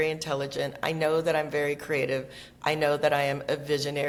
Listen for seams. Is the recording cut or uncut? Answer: uncut